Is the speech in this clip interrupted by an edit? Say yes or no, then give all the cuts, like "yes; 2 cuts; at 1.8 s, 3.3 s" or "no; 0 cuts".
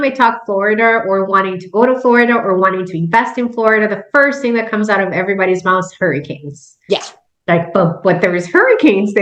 no; 0 cuts